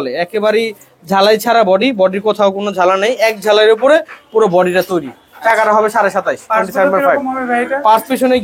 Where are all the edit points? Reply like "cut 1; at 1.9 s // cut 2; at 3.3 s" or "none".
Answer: none